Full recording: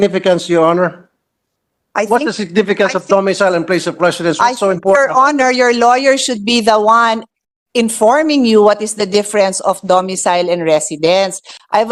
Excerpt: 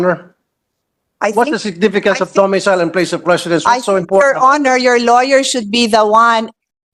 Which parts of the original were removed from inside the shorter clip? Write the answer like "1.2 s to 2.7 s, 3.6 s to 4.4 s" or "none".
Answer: none